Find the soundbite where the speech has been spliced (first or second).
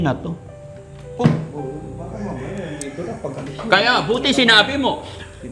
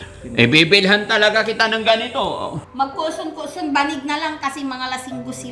second